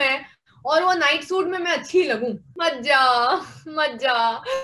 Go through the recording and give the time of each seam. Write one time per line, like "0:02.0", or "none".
0:02.5